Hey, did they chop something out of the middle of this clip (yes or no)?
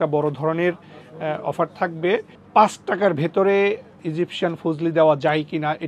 yes